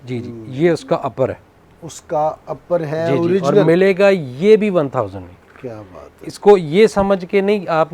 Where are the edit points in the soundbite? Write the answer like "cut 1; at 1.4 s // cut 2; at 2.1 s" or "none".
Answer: none